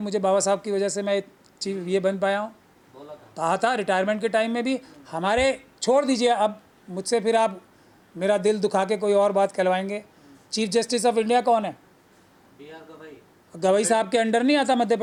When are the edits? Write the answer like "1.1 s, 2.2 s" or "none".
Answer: none